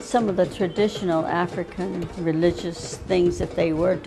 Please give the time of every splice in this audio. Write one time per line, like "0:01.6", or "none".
none